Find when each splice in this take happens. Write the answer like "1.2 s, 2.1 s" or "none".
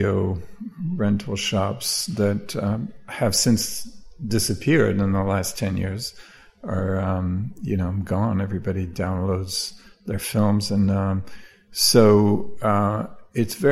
none